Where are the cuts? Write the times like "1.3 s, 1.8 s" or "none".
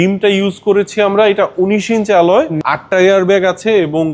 2.6 s